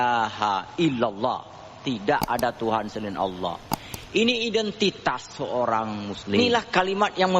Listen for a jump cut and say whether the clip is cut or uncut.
cut